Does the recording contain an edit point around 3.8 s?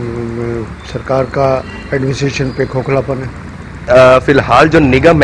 yes; 1 cut; at 3.8 s

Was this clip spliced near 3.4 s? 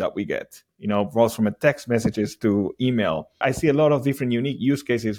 yes; 1 cut; at 3.4 s

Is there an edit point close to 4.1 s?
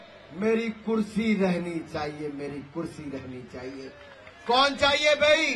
no; 0 cuts

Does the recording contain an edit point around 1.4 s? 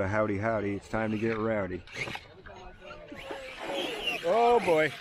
no; 1 cut; at 3.1 s

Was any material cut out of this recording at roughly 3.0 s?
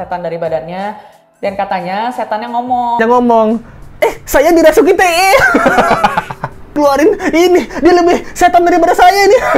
yes; 2 cuts; at 3.0 s, 6.8 s

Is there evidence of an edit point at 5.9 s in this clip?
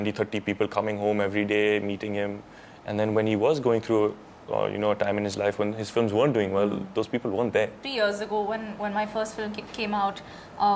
no; 1 cut; at 7.8 s

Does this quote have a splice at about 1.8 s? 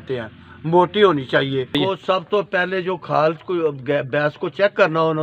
yes; 1 cut; at 1.8 s

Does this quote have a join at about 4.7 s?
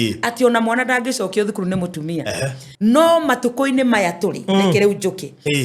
no; 1 cut; at 2.6 s

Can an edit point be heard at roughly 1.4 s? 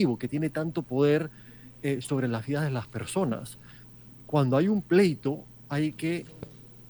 no; 0 cuts

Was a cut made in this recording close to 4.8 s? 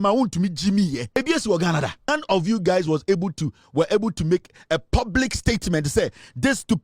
no; 2 cuts; at 1.2 s, 2.1 s

